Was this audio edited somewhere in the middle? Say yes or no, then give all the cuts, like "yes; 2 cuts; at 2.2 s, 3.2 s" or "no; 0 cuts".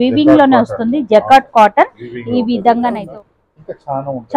yes; 1 cut; at 3.0 s